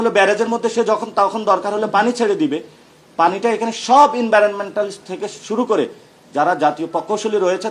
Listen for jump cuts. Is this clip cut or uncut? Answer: uncut